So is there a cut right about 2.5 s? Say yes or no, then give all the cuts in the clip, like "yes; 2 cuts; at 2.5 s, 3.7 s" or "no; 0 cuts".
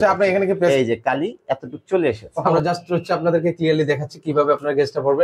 yes; 1 cut; at 2.5 s